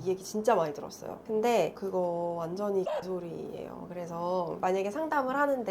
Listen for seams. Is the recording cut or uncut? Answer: cut